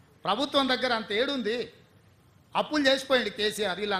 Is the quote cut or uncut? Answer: uncut